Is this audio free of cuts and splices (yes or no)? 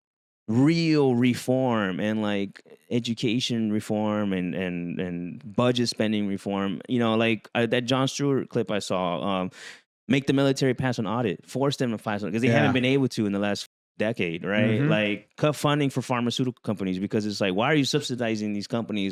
yes